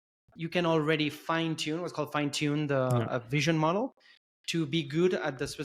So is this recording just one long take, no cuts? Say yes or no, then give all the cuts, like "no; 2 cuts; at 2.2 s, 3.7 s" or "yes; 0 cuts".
yes; 0 cuts